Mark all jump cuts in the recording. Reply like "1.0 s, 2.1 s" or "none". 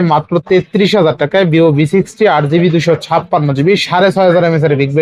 none